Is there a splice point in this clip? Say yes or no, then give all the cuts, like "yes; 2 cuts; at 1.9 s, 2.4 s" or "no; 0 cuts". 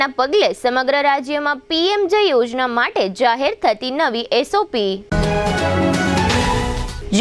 no; 0 cuts